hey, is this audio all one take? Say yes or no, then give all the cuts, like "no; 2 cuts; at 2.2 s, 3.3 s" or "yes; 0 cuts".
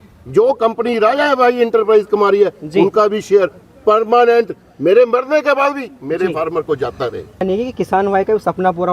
no; 1 cut; at 7.4 s